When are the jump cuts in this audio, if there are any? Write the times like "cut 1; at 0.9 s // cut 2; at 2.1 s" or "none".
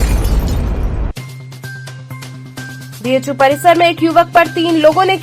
cut 1; at 2.3 s